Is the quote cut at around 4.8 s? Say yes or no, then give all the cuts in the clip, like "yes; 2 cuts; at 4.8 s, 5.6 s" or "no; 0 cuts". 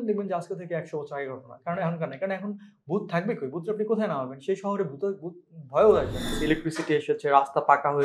no; 1 cut; at 6.4 s